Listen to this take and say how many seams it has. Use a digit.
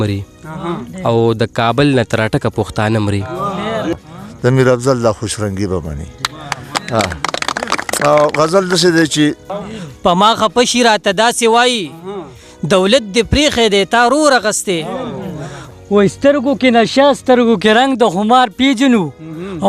3